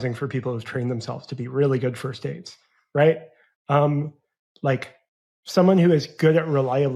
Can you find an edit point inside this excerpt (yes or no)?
no